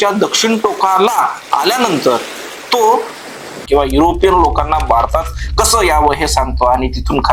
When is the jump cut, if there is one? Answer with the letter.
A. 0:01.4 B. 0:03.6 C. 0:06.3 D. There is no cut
B